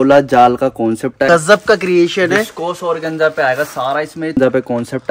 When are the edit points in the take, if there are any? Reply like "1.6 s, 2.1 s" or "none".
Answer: 1.3 s, 4.4 s